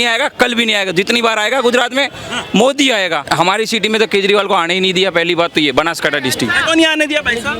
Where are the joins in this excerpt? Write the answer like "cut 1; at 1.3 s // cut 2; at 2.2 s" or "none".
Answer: cut 1; at 3.2 s // cut 2; at 6.6 s